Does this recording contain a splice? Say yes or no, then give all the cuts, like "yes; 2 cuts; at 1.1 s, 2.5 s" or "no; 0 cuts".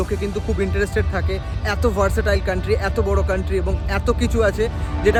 no; 0 cuts